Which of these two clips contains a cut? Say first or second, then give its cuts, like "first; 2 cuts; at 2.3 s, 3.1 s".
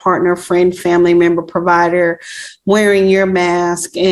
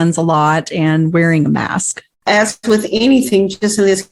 second; 1 cut; at 2.3 s